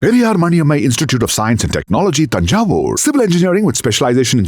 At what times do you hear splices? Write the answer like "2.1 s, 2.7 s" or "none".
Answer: none

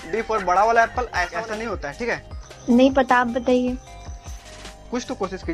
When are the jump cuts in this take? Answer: 1.3 s

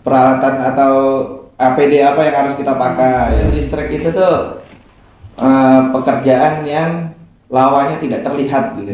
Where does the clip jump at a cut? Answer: 3.7 s

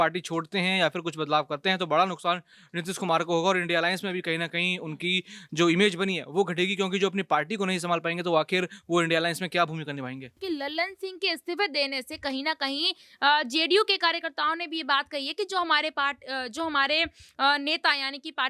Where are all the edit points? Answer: 10.4 s

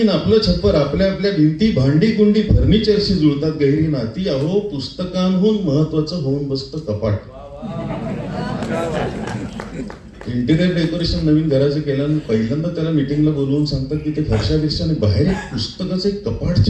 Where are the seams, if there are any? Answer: none

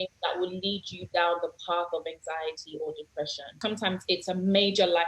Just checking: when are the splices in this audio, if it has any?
3.5 s

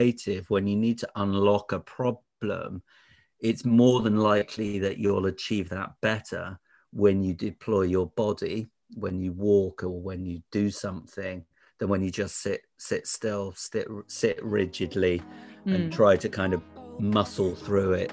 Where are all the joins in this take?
none

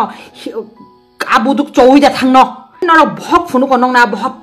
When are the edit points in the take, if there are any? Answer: 2.8 s

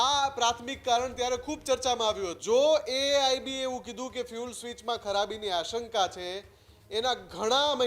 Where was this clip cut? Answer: 2.4 s

